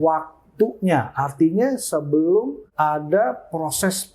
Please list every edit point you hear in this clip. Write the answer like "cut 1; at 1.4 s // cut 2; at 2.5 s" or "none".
cut 1; at 2.6 s